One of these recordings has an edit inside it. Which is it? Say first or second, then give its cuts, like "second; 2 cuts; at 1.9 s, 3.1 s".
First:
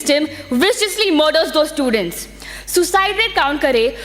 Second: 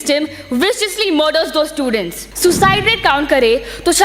second; 1 cut; at 2.2 s